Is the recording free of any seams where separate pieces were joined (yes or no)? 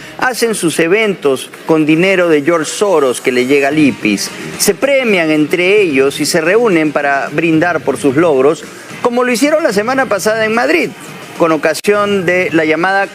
yes